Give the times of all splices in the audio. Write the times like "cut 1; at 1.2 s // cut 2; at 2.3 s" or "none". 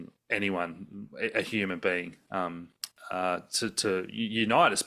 none